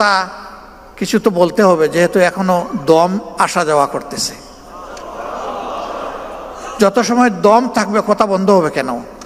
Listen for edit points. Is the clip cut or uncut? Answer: uncut